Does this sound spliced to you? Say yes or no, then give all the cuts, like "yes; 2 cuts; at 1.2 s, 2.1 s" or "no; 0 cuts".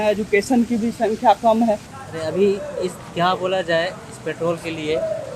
yes; 1 cut; at 1.9 s